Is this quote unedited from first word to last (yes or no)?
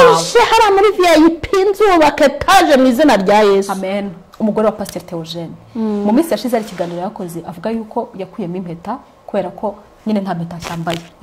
no